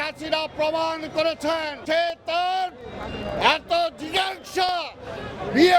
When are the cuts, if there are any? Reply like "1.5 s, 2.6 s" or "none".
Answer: 1.8 s